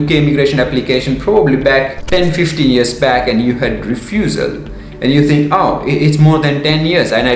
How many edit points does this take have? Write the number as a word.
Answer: one